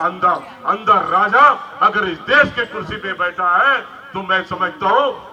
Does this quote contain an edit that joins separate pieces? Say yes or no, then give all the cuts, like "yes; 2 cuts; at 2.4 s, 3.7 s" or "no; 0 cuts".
no; 0 cuts